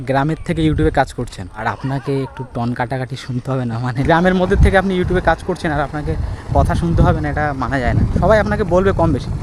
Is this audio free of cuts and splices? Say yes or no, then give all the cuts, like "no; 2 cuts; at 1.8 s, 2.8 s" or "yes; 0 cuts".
no; 2 cuts; at 1.6 s, 3.9 s